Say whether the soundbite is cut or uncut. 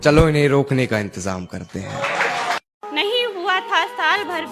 cut